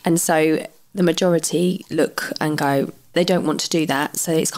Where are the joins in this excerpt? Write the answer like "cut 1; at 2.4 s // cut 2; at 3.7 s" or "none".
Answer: cut 1; at 3.1 s